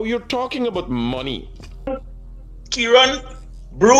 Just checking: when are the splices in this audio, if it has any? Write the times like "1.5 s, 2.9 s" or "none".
1.9 s